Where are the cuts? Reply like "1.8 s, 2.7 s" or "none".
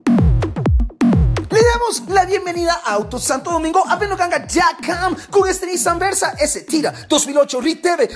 1.2 s